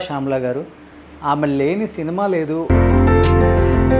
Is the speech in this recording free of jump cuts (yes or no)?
no